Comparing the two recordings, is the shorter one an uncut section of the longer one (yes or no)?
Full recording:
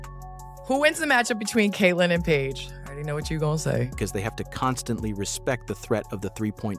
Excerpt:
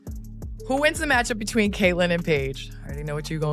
yes